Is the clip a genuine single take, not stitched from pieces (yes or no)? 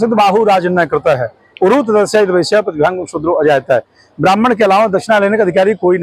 yes